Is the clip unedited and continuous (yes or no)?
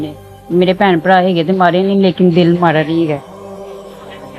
no